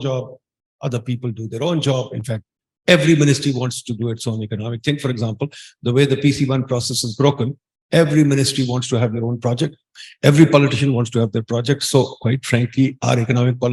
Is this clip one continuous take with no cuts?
yes; 0 cuts

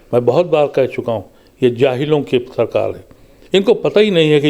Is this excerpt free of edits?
yes; 0 cuts

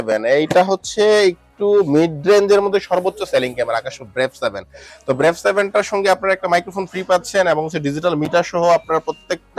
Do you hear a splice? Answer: no; 0 cuts

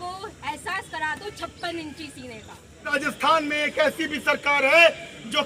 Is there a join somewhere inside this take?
yes; 1 cut; at 2.9 s

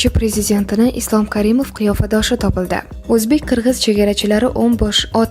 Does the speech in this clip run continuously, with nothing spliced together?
no; 1 cut; at 2.9 s

